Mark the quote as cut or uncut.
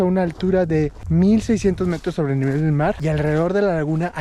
cut